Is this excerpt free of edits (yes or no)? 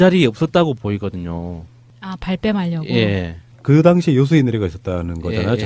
no